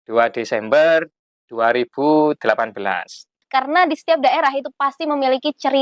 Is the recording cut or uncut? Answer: cut